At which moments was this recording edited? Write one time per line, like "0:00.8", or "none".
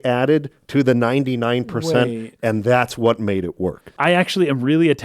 0:03.9